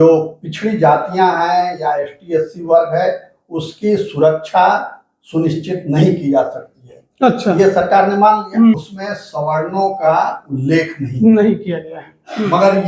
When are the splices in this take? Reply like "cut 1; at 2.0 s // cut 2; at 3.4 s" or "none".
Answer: cut 1; at 8.8 s